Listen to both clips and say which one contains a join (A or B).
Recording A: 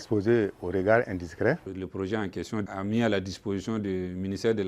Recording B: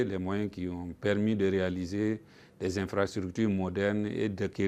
A